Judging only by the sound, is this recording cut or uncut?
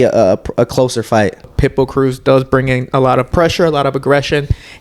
cut